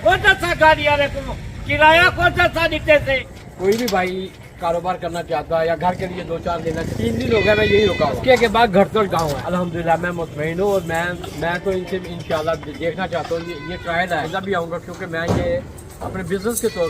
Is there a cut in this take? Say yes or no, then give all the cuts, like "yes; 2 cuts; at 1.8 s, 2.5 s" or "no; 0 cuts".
yes; 5 cuts; at 3.3 s, 6.9 s, 8.2 s, 9.4 s, 14.3 s